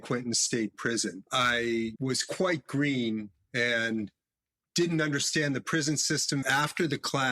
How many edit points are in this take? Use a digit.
3